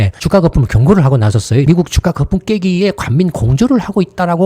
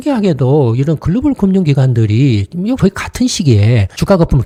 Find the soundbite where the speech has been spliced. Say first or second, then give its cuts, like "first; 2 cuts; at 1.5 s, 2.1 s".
first; 1 cut; at 1.6 s